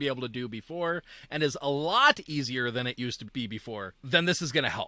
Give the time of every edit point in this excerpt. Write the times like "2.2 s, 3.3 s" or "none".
3.9 s